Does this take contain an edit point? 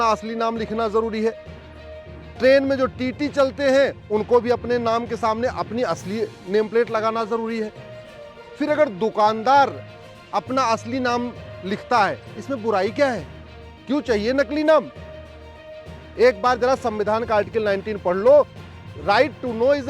no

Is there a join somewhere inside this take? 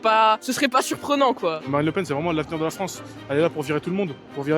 yes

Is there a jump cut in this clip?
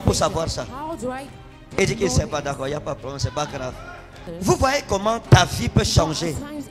yes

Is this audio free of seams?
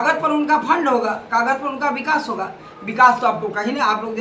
yes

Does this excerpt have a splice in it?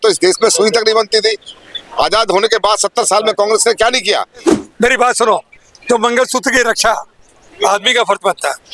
yes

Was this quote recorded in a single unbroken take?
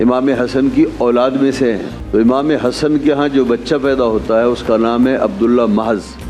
no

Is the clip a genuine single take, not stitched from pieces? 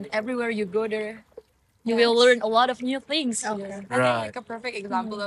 yes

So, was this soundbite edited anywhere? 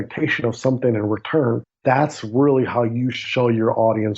yes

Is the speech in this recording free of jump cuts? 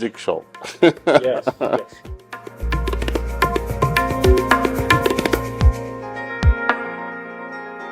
no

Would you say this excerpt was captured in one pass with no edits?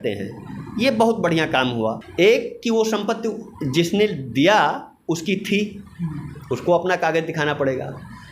no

